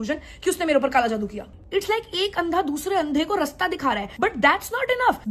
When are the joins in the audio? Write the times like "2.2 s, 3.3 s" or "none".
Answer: 1.6 s